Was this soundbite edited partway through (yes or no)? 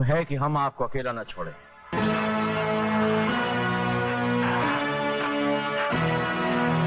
yes